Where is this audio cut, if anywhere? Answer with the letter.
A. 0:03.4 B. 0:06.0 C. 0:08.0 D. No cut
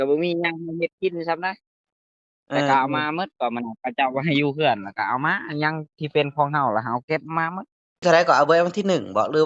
C